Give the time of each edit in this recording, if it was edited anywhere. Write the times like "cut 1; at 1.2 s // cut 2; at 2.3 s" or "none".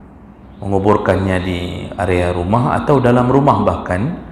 none